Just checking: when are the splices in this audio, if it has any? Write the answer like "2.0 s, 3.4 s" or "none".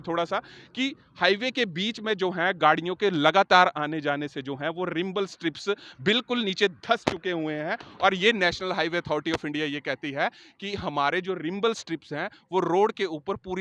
none